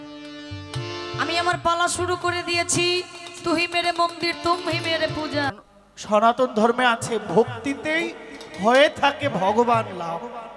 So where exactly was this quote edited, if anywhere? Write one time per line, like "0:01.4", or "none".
0:05.5